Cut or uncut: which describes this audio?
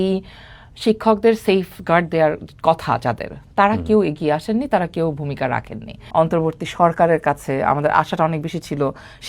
cut